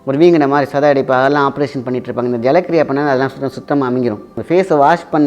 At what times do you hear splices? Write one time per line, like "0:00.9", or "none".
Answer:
0:04.3